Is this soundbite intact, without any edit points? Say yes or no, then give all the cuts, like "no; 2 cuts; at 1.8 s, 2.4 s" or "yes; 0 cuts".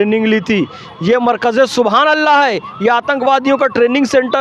yes; 0 cuts